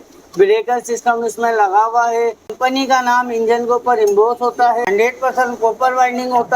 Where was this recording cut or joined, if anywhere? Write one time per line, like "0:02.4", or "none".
0:02.5
0:04.9